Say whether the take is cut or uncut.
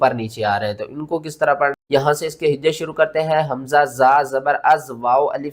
uncut